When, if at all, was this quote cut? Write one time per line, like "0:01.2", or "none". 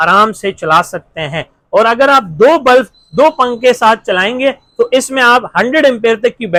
none